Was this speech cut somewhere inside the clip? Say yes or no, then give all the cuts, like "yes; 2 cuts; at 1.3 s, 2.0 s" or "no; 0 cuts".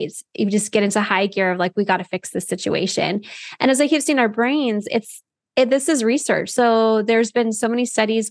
no; 0 cuts